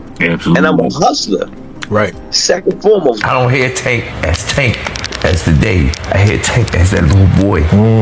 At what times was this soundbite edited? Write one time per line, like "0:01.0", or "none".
0:03.2